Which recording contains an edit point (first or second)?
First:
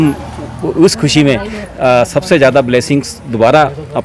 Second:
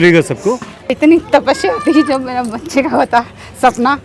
second